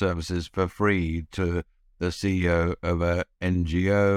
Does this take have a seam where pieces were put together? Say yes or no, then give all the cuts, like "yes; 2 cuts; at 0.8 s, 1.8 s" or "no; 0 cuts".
no; 0 cuts